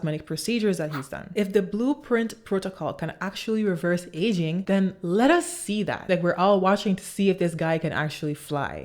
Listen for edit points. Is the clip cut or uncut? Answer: cut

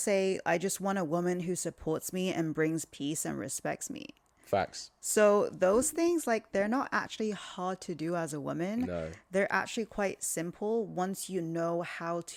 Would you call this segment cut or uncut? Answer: uncut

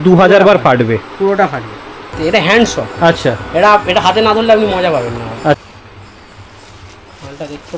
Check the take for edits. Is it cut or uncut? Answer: cut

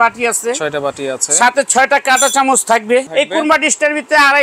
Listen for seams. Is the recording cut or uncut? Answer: cut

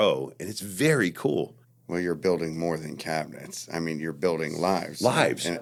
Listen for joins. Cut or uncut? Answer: uncut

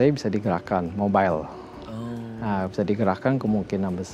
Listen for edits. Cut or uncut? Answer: uncut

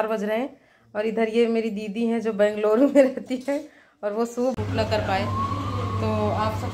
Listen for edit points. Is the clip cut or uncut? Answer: cut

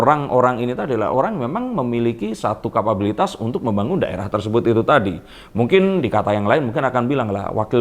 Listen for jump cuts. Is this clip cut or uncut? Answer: uncut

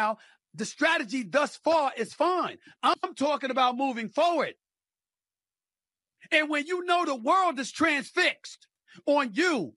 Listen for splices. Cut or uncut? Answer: cut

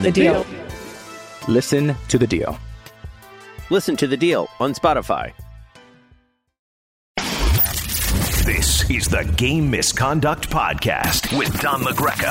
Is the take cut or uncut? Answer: cut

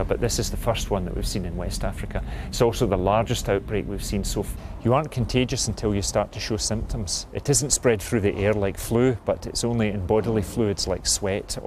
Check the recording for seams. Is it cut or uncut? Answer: cut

